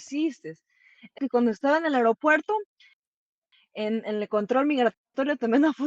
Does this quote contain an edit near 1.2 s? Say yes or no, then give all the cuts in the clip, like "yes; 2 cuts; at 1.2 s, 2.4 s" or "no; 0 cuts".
yes; 1 cut; at 1.2 s